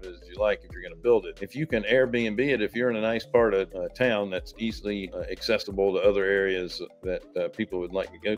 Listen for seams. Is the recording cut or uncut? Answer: cut